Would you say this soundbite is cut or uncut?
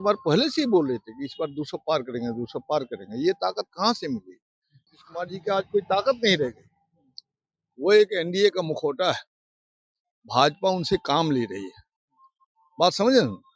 cut